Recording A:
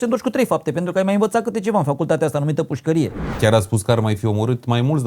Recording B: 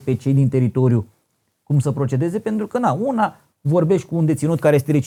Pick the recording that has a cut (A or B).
A